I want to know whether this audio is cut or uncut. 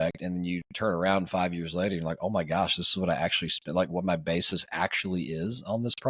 uncut